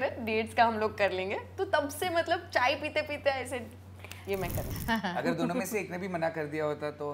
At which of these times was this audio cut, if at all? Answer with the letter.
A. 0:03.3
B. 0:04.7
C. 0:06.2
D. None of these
B